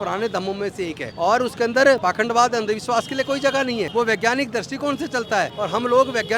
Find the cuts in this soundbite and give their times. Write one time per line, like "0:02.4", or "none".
0:01.0
0:02.0
0:03.9
0:05.5